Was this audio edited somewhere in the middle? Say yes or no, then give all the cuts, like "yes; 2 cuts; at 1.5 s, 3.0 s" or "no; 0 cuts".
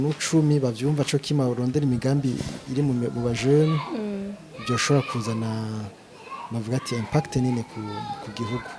no; 0 cuts